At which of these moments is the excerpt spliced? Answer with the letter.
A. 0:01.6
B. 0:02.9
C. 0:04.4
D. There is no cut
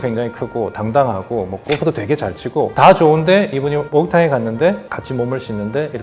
D